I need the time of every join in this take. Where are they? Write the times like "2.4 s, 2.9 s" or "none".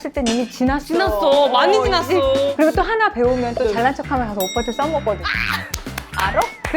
2.5 s